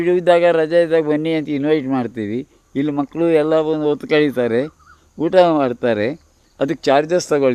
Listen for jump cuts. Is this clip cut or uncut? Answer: uncut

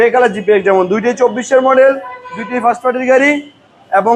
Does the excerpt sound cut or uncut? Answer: uncut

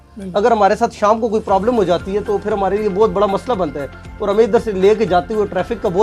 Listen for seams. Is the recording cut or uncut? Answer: uncut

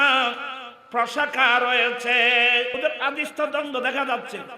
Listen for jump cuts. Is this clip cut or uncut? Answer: cut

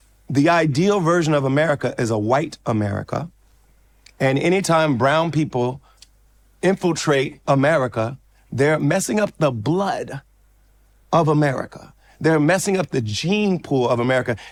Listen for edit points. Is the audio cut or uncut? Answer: uncut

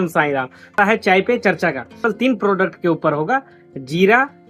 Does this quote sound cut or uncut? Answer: cut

